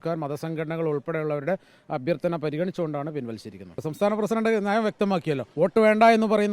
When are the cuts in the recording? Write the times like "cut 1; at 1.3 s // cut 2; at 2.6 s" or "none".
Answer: cut 1; at 3.9 s // cut 2; at 5.5 s